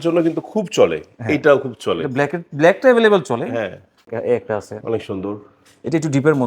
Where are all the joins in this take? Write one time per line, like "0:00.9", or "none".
0:04.1